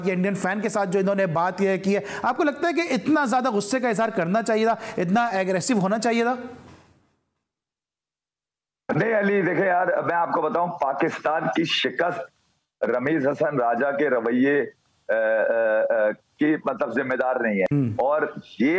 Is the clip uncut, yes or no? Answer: yes